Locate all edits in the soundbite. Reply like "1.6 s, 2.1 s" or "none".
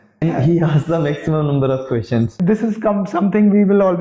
2.3 s